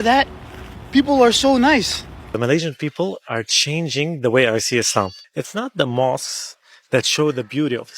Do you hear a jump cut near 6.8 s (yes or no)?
no